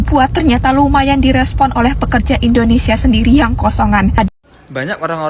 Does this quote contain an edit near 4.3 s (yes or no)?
yes